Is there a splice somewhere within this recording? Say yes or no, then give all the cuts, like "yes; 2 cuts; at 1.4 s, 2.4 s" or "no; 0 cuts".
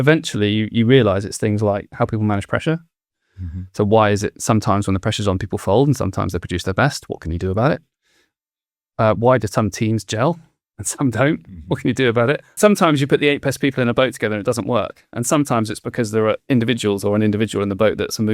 yes; 1 cut; at 12.5 s